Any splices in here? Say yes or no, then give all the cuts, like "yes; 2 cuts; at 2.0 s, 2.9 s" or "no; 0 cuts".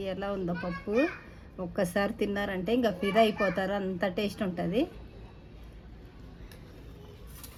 no; 0 cuts